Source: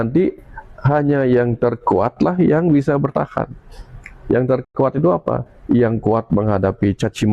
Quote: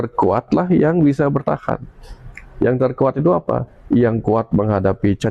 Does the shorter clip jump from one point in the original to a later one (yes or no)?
yes